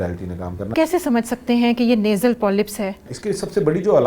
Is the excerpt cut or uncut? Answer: cut